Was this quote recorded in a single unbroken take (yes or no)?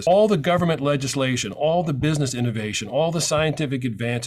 yes